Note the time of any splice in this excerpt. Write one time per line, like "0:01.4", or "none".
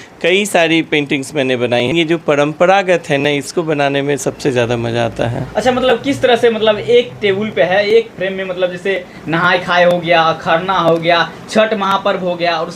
0:01.9